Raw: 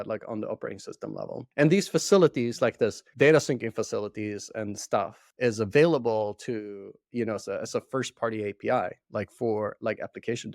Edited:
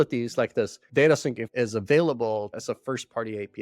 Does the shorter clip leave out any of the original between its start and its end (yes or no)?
yes